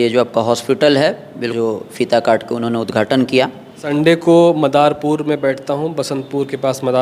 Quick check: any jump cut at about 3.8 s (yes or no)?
yes